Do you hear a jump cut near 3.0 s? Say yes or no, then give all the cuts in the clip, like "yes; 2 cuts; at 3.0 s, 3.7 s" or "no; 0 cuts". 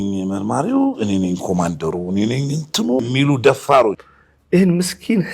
yes; 2 cuts; at 3.0 s, 4.0 s